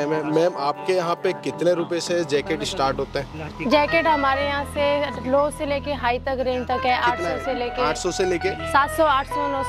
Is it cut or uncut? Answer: uncut